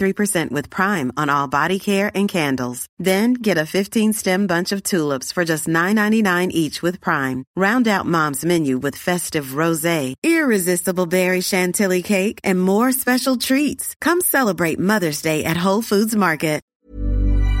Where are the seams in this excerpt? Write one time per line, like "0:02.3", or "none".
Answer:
0:16.7